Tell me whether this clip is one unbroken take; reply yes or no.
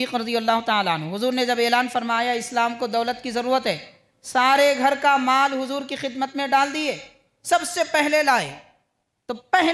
yes